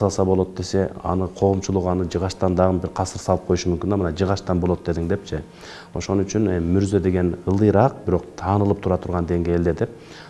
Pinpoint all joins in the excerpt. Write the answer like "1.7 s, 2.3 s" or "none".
none